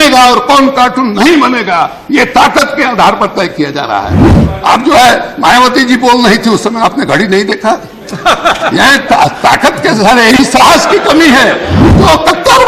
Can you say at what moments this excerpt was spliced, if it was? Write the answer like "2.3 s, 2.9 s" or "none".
4.2 s, 11.8 s